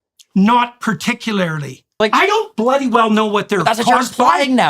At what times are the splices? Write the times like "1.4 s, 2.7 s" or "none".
2.0 s